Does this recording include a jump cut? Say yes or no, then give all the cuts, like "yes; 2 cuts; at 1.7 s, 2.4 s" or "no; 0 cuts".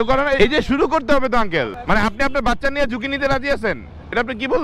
yes; 1 cut; at 1.8 s